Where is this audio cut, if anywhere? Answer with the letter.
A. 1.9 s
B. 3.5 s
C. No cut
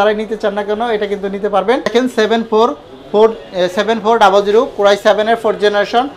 A